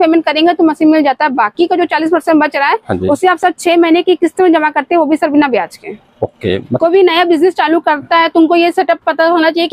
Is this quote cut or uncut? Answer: cut